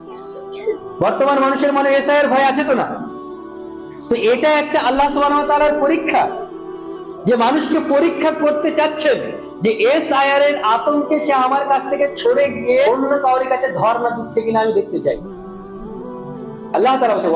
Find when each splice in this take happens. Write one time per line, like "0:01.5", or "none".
0:12.9

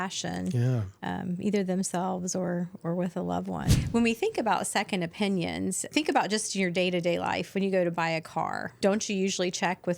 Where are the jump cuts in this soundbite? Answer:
0:03.8
0:05.9
0:08.7

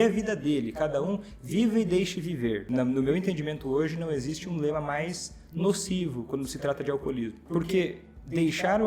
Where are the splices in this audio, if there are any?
0:02.6
0:07.4

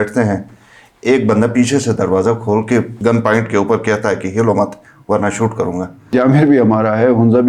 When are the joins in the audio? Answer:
0:02.9
0:06.1

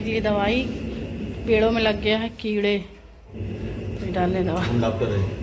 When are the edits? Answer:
none

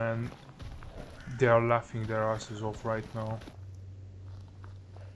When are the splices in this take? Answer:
0:03.5

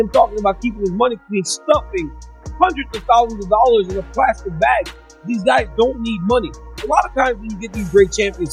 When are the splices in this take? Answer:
none

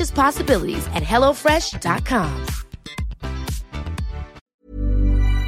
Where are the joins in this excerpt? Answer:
0:04.4

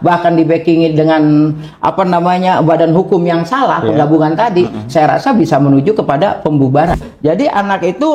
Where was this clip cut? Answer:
0:07.0

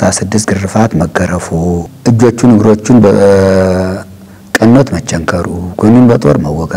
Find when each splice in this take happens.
0:01.9

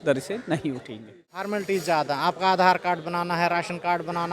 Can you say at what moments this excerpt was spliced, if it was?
0:01.5

